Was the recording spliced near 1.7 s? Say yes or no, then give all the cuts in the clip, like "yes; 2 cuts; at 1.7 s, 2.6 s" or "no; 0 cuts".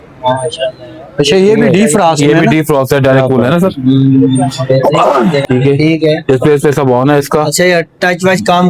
no; 1 cut; at 5.4 s